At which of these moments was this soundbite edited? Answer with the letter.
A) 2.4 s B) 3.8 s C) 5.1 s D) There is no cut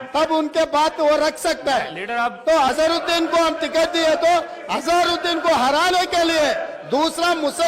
A